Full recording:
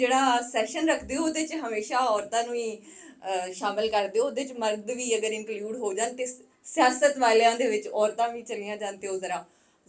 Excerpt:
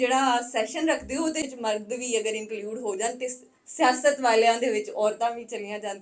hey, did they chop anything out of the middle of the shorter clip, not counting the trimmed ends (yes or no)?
yes